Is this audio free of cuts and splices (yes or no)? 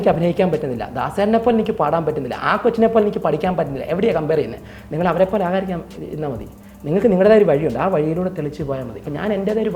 yes